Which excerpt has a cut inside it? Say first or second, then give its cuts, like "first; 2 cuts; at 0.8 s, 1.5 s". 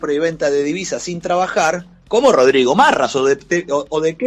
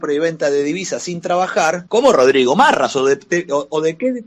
second; 1 cut; at 1.8 s